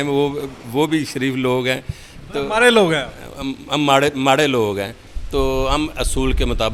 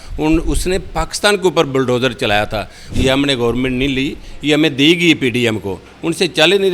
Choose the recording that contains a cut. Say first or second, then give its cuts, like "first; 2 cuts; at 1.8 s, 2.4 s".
second; 1 cut; at 2.8 s